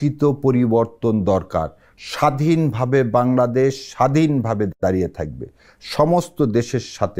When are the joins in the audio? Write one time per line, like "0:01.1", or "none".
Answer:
none